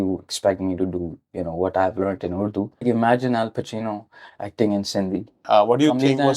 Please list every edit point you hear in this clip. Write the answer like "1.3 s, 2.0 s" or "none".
2.8 s, 5.4 s